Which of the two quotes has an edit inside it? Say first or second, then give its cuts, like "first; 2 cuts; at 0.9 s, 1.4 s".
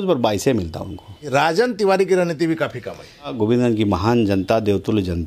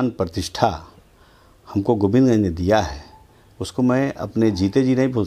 first; 2 cuts; at 1.3 s, 3.3 s